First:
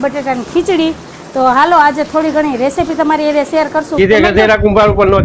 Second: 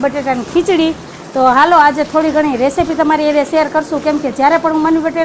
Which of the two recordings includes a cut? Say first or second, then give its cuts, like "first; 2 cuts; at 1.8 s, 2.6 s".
first; 1 cut; at 3.9 s